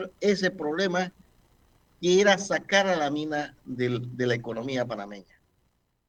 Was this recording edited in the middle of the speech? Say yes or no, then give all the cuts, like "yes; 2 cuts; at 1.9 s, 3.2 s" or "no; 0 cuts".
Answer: no; 0 cuts